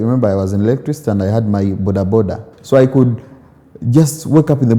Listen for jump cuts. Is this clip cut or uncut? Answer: cut